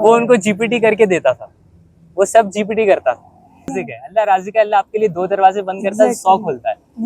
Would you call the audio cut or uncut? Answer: cut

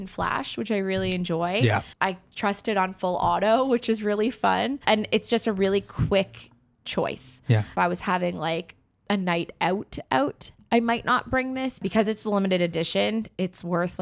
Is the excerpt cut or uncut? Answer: cut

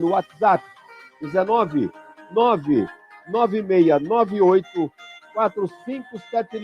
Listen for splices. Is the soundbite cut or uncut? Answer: cut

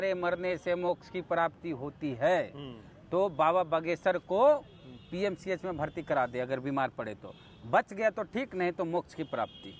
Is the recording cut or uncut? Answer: uncut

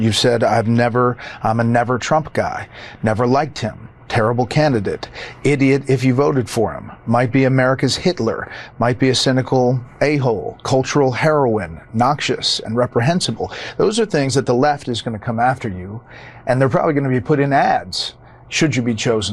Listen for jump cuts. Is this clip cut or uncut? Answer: uncut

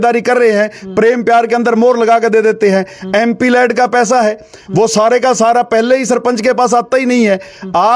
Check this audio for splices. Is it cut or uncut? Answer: uncut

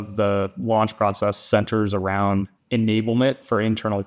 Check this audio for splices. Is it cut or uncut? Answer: cut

